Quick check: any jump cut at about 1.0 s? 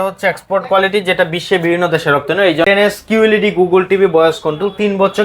no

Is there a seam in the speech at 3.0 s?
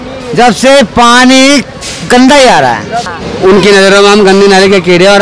yes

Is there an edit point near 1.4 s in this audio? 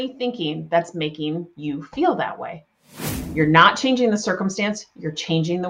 no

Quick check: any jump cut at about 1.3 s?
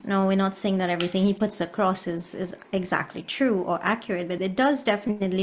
no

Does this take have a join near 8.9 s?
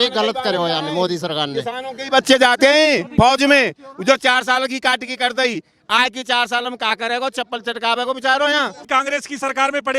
yes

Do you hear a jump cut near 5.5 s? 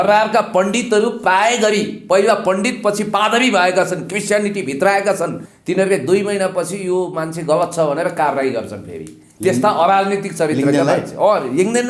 yes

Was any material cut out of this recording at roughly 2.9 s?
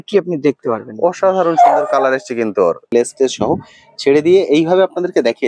yes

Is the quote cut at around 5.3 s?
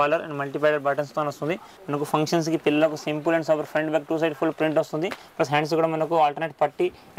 no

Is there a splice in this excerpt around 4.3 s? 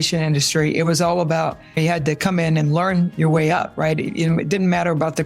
no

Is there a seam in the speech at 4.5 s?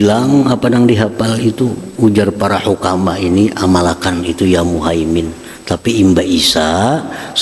no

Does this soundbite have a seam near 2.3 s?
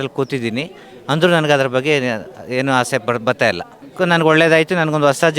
no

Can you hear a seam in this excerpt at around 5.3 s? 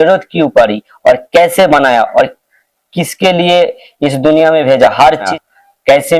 yes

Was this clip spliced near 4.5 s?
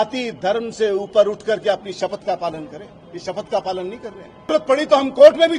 yes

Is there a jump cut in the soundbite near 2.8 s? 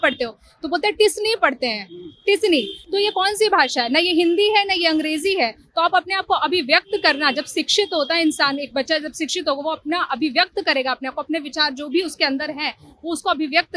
no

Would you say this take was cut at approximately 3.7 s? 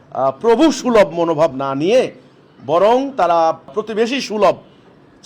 yes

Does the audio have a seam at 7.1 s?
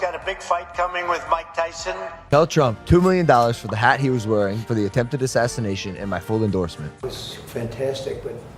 yes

